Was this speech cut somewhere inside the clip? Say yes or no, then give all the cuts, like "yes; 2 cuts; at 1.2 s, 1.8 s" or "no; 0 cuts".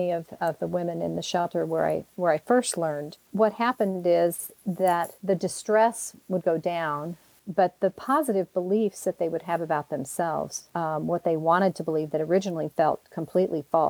no; 0 cuts